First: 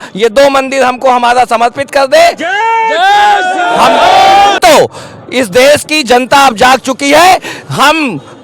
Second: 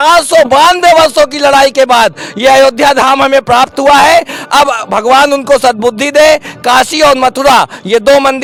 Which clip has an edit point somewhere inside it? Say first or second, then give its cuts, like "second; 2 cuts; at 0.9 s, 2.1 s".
first; 1 cut; at 4.6 s